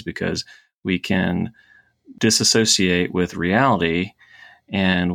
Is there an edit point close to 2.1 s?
yes; 1 cut; at 2.1 s

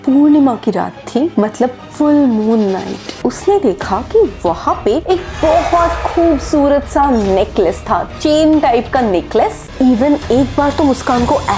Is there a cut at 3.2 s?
yes; 2 cuts; at 3.2 s, 9.7 s

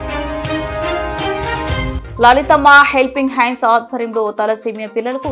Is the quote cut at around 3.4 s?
no; 1 cut; at 2.0 s

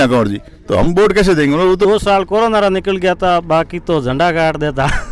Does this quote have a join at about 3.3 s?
no; 1 cut; at 1.9 s

